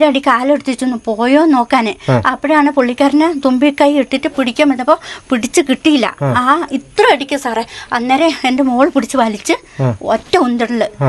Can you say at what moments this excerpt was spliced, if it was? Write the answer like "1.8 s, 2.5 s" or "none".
none